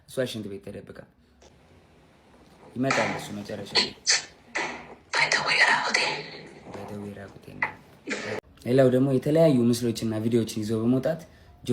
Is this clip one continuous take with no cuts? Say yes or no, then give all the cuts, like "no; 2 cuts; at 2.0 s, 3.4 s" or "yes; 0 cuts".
no; 1 cut; at 8.4 s